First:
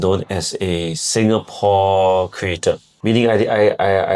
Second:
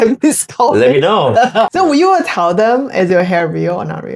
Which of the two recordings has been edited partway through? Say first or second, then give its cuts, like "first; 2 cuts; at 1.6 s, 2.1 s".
second; 1 cut; at 1.7 s